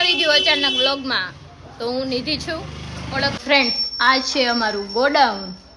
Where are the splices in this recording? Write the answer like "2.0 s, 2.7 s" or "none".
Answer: 3.4 s